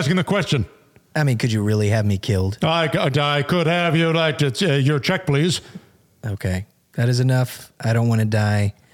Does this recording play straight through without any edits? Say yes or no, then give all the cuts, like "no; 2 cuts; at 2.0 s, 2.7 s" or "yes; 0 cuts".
yes; 0 cuts